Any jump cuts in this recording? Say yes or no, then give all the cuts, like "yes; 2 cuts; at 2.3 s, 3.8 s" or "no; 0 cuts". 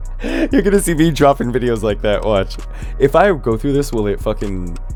no; 0 cuts